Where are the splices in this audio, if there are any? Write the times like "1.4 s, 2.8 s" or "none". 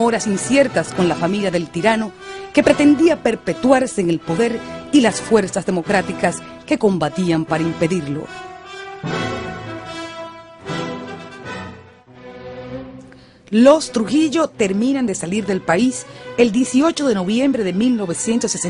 13.4 s